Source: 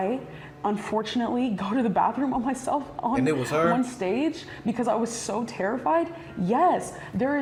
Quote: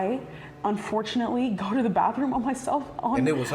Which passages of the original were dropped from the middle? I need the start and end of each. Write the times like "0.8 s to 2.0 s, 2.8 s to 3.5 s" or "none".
none